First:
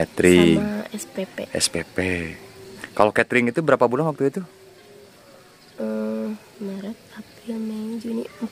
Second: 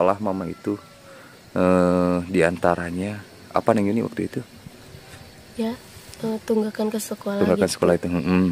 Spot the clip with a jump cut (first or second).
first